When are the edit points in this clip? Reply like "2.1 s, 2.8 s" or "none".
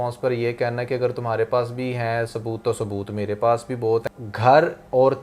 4.2 s